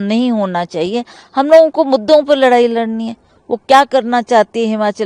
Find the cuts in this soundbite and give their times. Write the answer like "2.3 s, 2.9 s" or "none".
none